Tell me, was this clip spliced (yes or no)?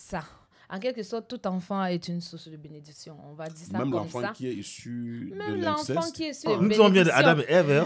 yes